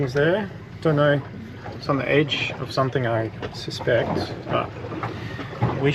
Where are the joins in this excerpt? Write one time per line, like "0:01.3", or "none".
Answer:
none